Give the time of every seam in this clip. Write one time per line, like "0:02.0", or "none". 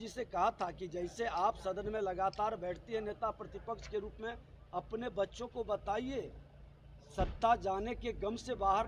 none